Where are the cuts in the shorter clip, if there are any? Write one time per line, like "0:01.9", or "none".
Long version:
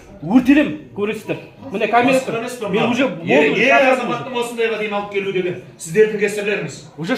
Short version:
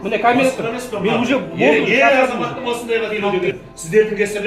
0:03.2